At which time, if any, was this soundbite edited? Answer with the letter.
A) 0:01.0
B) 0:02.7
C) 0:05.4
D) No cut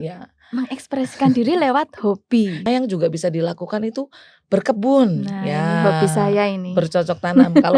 B